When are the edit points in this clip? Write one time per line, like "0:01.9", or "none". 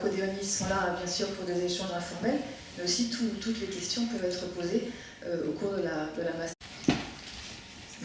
none